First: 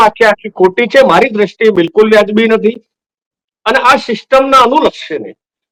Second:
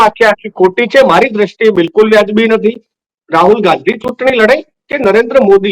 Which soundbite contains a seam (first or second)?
second